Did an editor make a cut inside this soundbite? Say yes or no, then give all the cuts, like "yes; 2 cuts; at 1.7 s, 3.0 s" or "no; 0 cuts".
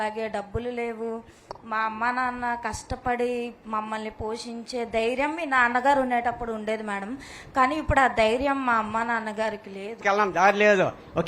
yes; 1 cut; at 10.0 s